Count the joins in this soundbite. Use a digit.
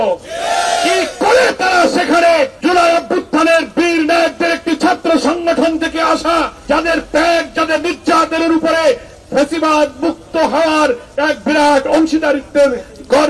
2